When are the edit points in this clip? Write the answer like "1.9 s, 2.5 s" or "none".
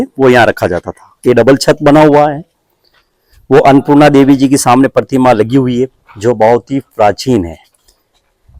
none